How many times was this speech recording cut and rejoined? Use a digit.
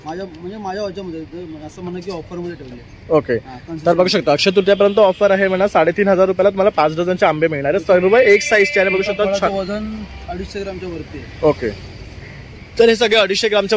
0